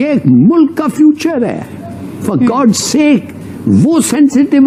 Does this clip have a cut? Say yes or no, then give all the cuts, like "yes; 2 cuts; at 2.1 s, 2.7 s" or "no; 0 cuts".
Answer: no; 0 cuts